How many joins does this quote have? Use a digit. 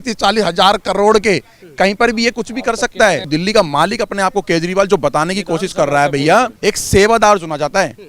2